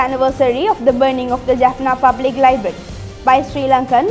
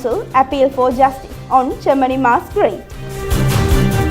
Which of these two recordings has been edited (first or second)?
second